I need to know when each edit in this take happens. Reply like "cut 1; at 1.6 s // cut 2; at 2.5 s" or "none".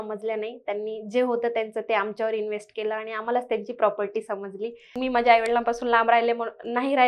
cut 1; at 4.9 s